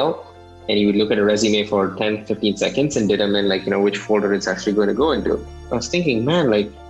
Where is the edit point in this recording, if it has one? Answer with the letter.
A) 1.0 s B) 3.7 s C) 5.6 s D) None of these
C